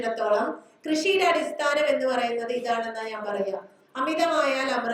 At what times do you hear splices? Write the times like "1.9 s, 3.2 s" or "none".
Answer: none